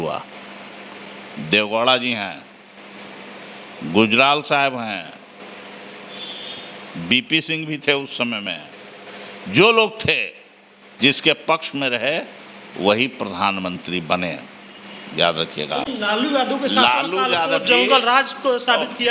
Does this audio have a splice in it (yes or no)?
no